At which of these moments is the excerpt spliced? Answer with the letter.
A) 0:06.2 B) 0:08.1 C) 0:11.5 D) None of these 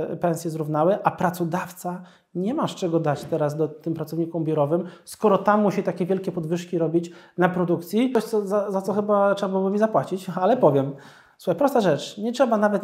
B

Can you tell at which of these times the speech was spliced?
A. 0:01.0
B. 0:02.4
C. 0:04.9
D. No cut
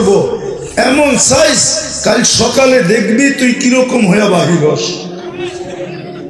C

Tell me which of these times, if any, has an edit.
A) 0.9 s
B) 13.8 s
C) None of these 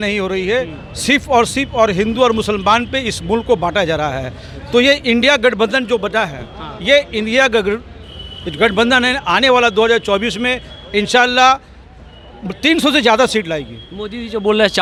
C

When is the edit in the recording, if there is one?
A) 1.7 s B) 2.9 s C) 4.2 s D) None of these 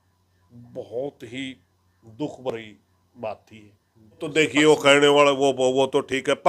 C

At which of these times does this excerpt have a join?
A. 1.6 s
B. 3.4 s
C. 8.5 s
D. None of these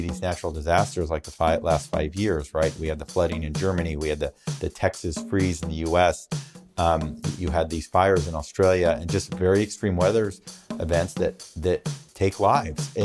D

